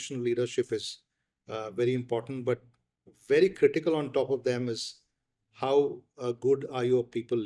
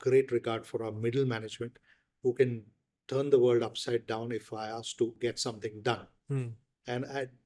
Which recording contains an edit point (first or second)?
second